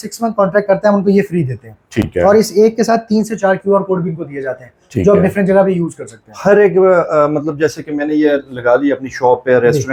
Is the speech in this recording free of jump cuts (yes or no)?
yes